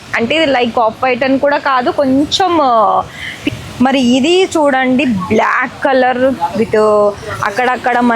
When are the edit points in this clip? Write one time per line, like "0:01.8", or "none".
0:03.4